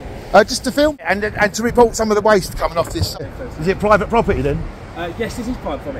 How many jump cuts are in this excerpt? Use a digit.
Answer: 2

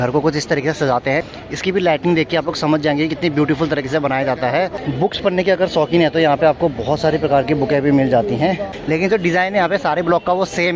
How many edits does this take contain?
3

